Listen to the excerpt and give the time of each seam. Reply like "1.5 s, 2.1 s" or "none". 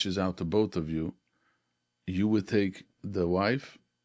none